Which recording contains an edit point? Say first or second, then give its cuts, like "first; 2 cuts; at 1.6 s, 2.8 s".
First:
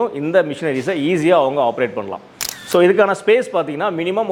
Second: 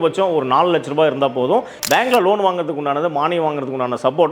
second; 1 cut; at 1.8 s